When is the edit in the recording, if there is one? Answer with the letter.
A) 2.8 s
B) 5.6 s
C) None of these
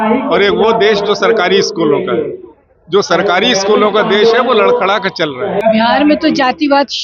B